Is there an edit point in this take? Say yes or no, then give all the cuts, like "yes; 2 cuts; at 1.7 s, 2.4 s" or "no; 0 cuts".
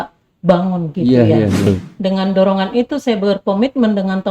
yes; 1 cut; at 1.7 s